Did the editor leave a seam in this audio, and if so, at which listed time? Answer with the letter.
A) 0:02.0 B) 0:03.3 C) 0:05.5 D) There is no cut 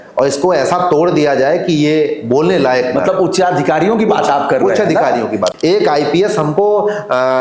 C